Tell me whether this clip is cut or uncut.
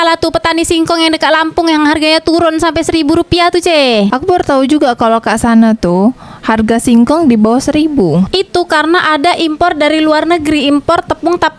uncut